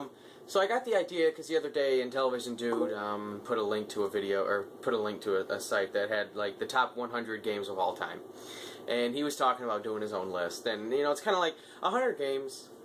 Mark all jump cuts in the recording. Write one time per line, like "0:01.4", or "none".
0:05.7